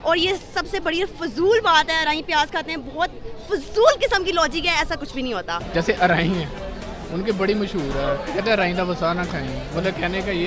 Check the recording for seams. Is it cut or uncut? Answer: cut